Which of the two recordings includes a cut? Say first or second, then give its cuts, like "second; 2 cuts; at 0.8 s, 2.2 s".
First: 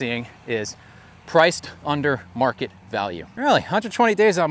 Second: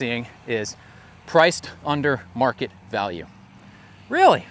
first; 1 cut; at 3.2 s